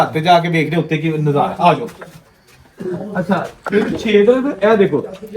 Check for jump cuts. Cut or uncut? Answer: cut